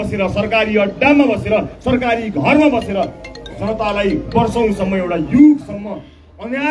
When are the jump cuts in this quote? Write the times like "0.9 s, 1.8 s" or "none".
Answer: none